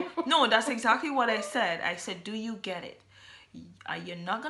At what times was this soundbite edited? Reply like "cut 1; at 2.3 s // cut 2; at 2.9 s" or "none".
none